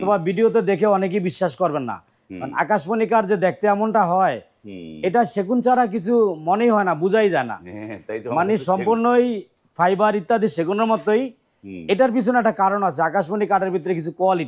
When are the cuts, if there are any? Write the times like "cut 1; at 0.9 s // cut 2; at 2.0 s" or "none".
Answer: none